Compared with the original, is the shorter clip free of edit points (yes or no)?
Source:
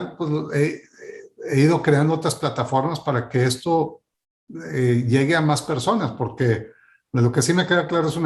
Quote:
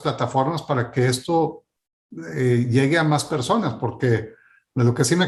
yes